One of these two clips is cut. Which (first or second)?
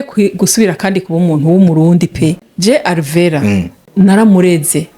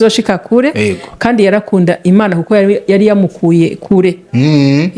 first